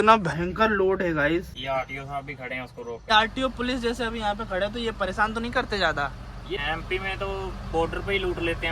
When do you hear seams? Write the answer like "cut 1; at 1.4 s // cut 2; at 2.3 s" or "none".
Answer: cut 1; at 1.5 s // cut 2; at 3.1 s // cut 3; at 6.6 s